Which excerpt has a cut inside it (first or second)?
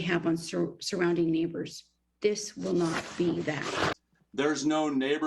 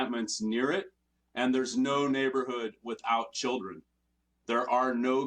first